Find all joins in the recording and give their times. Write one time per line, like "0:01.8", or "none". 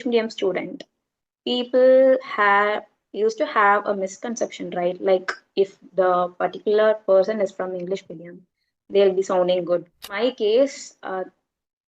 0:10.1